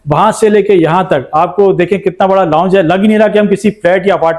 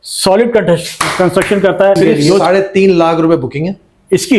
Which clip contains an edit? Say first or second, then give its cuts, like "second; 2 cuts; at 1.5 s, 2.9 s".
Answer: second; 1 cut; at 2.0 s